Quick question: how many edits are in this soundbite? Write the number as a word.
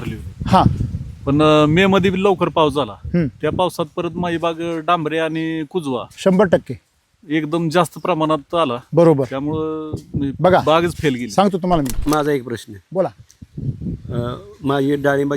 one